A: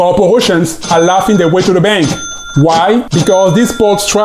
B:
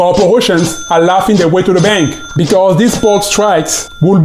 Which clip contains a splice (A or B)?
B